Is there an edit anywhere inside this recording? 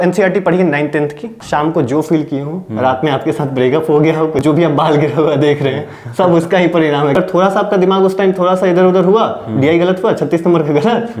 yes; 3 cuts; at 1.3 s, 4.4 s, 7.2 s

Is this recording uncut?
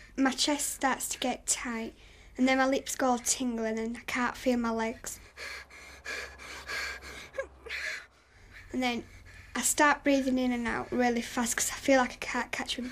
yes; 0 cuts

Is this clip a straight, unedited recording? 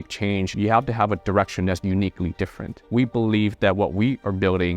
no; 1 cut; at 2.8 s

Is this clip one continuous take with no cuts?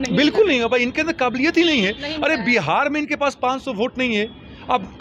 yes; 0 cuts

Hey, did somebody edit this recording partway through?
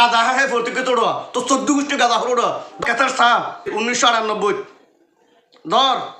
yes; 2 cuts; at 2.8 s, 3.7 s

